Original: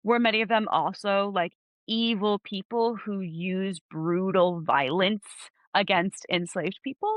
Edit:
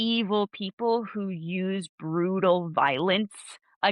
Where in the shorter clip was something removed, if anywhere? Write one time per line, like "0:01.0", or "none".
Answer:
none